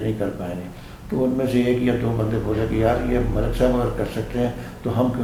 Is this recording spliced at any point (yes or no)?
no